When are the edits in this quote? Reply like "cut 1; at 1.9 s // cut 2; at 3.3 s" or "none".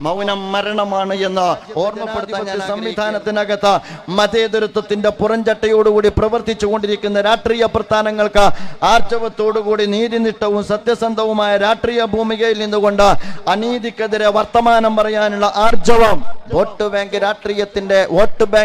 cut 1; at 2.4 s